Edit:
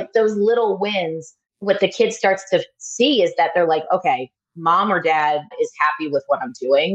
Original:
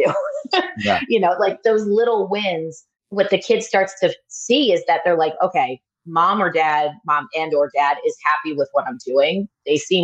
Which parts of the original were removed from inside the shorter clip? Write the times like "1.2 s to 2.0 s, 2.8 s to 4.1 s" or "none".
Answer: 7.0 s to 8.0 s